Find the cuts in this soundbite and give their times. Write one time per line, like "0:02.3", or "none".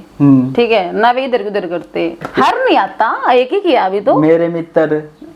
0:02.2

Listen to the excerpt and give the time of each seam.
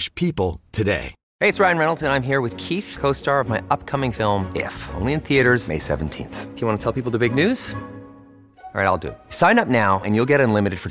0:01.2

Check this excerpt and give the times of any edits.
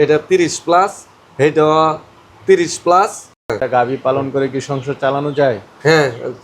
0:03.6

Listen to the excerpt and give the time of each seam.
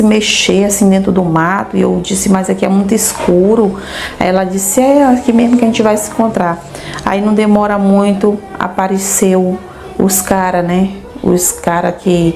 none

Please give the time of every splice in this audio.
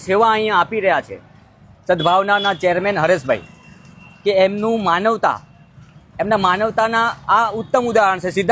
none

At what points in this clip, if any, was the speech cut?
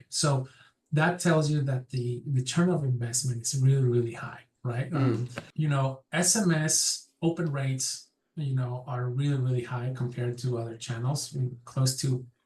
0:05.4

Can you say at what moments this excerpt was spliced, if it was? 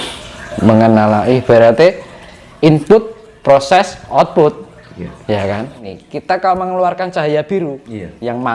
0:05.8

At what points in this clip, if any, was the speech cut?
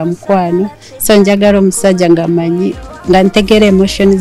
0:02.9

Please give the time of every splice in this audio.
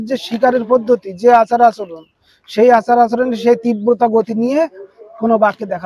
none

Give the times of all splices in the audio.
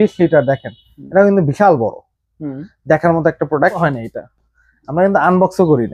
0:03.8

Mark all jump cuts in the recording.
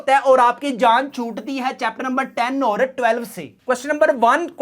0:03.6

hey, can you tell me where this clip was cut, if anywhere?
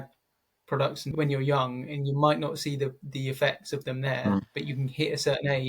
0:01.0

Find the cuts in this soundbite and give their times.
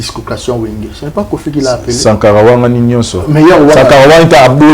none

